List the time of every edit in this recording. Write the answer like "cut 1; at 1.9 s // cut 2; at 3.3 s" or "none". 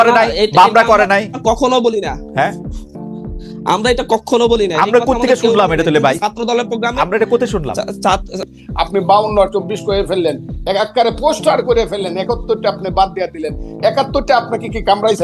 cut 1; at 8.4 s